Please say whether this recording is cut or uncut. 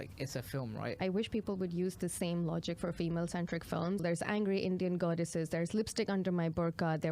cut